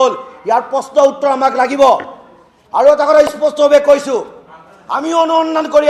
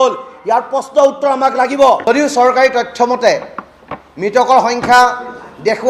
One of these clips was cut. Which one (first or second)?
second